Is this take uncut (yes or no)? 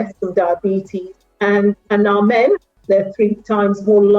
no